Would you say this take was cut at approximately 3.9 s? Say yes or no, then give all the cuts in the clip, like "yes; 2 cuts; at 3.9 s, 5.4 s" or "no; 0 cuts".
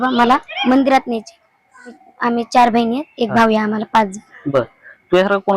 no; 1 cut; at 1.9 s